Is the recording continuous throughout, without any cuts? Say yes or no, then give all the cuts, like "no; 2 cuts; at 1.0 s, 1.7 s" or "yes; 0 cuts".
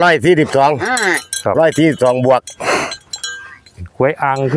yes; 0 cuts